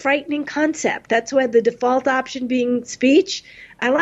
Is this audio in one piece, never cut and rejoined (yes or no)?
yes